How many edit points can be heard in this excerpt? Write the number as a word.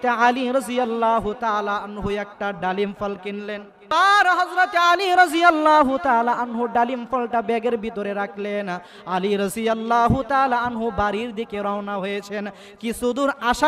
one